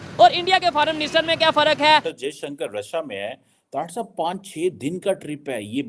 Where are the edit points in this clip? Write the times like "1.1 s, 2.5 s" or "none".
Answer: 2.1 s